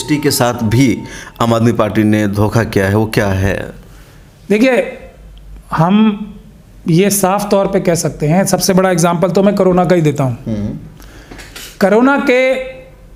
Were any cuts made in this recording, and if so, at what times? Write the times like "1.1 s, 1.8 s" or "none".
none